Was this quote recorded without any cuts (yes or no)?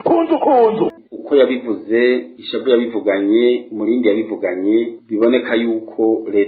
no